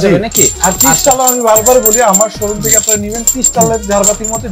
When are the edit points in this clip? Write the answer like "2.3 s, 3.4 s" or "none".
none

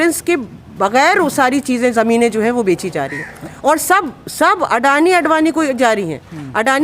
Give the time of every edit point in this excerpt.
none

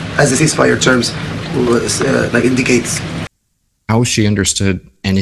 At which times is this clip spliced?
none

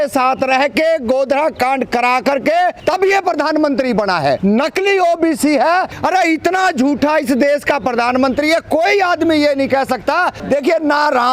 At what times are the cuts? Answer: 2.8 s, 4.4 s, 5.9 s, 10.4 s

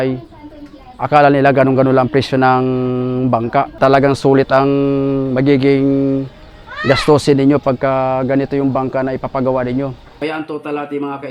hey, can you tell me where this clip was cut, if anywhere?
3.8 s, 10.0 s

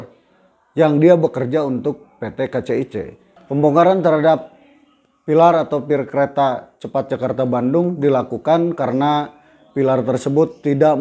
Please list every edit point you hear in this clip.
3.3 s

